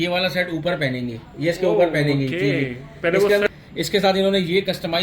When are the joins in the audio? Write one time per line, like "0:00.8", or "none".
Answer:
0:03.5